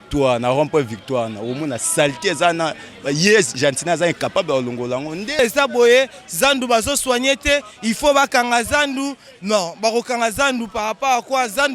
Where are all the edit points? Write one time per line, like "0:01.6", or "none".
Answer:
0:05.4